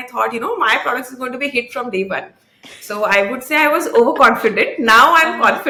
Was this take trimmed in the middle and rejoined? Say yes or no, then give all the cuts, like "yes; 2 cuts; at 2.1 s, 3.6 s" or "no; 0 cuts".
no; 0 cuts